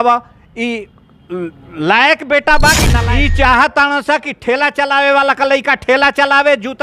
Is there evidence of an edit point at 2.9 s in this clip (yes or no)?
yes